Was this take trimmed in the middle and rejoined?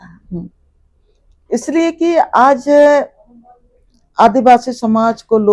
no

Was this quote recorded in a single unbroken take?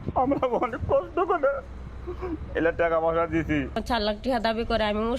no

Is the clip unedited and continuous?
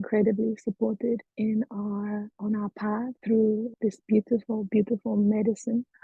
no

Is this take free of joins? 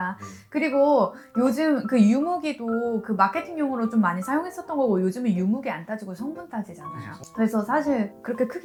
yes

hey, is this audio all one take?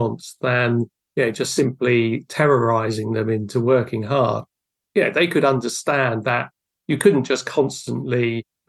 yes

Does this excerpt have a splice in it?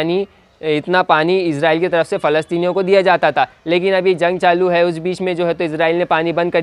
no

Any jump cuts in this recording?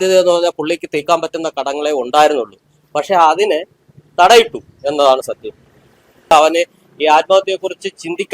yes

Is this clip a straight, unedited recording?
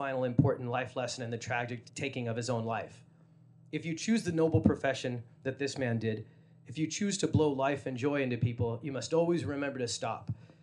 no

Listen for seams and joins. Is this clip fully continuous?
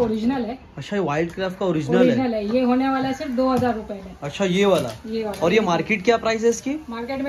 yes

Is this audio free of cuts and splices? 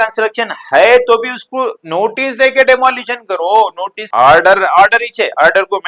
no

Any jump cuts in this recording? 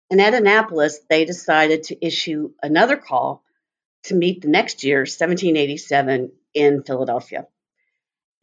no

